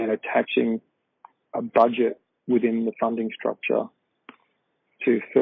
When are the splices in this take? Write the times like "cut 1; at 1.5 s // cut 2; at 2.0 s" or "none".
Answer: none